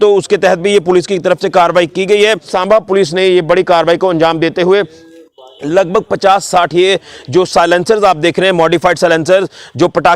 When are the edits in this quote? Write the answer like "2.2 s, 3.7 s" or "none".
2.5 s